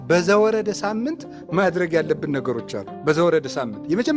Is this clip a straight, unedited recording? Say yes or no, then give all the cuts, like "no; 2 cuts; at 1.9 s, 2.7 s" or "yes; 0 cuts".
yes; 0 cuts